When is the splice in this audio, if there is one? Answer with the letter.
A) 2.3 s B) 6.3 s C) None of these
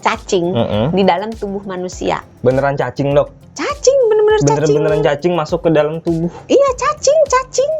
A